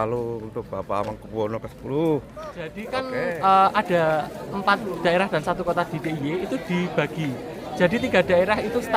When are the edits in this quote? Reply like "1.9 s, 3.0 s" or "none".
2.8 s